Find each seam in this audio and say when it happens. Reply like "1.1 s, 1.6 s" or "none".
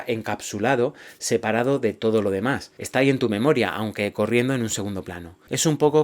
2.7 s